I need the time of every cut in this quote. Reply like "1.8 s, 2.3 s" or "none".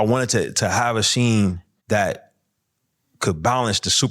1.7 s